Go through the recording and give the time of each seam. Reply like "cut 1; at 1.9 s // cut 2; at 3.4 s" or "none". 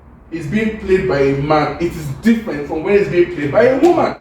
none